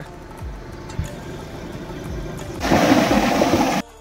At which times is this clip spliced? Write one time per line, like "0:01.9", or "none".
none